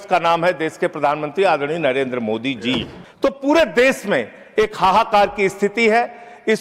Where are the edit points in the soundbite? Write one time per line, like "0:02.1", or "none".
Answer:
0:03.0